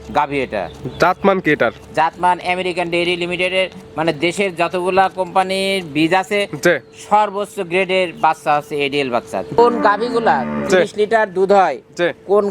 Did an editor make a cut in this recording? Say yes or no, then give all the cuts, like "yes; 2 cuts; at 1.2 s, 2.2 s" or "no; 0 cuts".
yes; 1 cut; at 9.6 s